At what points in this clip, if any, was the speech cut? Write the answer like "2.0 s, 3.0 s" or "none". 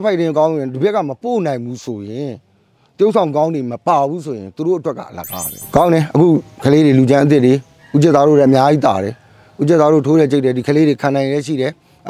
5.5 s